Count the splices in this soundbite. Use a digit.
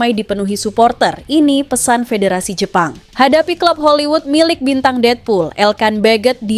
1